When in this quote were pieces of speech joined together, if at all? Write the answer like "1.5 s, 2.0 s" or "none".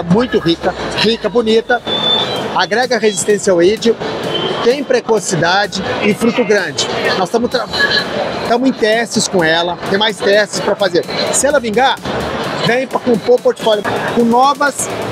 13.8 s